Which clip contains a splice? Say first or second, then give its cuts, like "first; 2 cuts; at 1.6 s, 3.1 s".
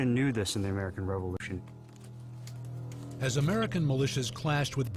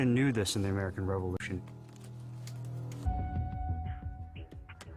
first; 1 cut; at 3.1 s